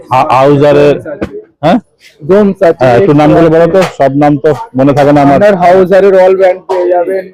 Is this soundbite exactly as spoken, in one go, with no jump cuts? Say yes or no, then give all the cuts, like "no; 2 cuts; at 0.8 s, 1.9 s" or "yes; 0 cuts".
yes; 0 cuts